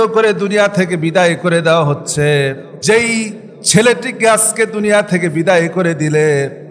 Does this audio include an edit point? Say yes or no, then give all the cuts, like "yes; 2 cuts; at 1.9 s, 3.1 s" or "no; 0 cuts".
yes; 1 cut; at 2.7 s